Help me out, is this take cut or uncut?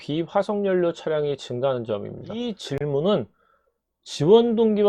cut